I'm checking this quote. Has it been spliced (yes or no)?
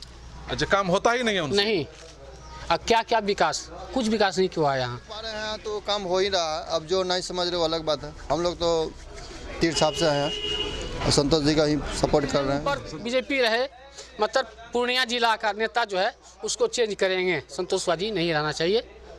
yes